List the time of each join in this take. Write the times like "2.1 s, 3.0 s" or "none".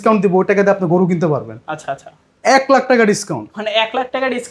none

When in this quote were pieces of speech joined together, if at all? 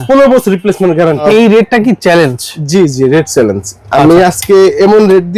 1.2 s

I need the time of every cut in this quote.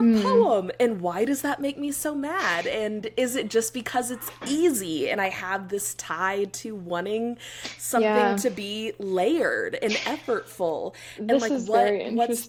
none

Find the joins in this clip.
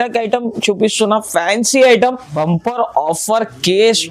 2.3 s

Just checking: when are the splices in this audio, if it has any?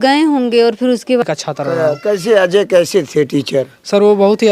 1.2 s

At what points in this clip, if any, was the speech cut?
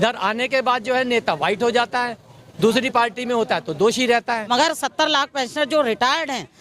4.4 s

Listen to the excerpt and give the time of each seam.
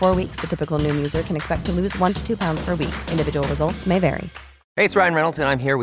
none

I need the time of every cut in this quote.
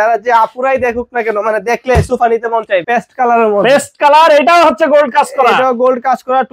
2.8 s

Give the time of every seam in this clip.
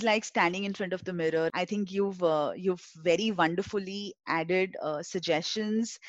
1.5 s

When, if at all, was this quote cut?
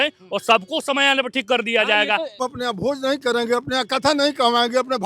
2.4 s

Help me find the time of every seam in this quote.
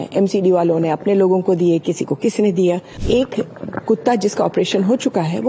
2.9 s

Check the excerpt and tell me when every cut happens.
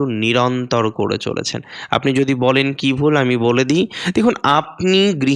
none

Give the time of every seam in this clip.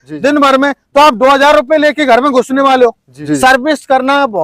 3.1 s

